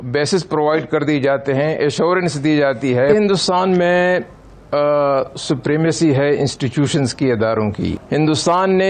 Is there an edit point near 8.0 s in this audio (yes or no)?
yes